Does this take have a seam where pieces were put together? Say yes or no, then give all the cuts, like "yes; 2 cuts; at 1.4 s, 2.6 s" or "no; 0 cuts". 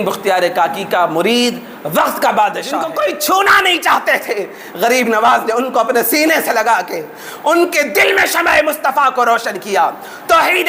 yes; 1 cut; at 2.9 s